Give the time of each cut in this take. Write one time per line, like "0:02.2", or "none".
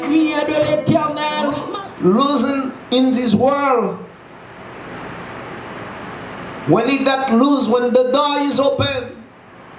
0:01.7